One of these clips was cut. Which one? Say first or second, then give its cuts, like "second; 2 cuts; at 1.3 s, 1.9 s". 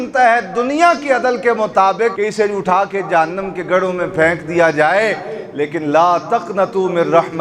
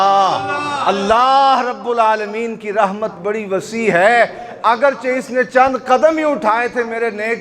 first; 1 cut; at 2.2 s